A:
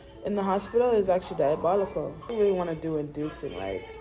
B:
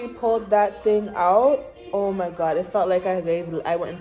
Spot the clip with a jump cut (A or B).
A